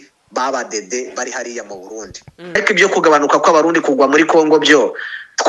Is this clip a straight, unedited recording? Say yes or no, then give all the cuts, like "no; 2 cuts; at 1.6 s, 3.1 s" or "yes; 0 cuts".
no; 1 cut; at 2.6 s